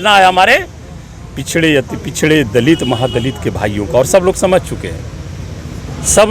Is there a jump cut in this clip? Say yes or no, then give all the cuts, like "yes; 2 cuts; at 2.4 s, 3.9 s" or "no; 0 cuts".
no; 0 cuts